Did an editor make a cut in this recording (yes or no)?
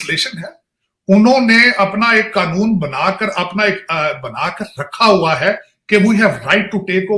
no